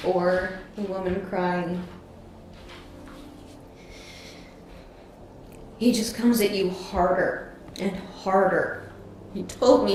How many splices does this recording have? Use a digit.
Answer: 0